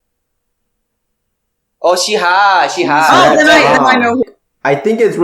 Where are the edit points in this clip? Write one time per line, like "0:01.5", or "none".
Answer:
0:04.2